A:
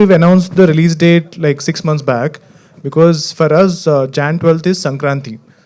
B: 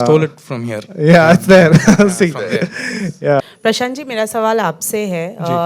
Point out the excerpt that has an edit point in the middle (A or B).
B